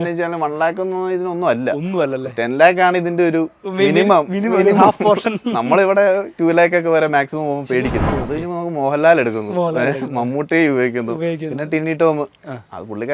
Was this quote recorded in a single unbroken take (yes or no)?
no